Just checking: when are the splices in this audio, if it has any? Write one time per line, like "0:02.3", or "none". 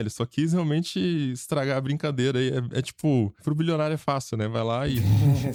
none